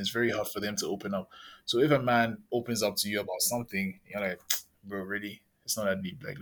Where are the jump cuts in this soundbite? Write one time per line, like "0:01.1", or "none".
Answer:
none